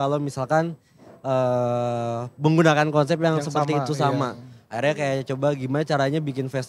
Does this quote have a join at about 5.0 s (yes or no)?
no